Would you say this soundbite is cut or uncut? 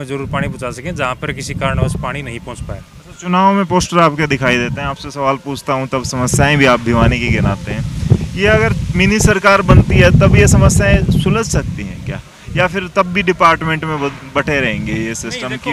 uncut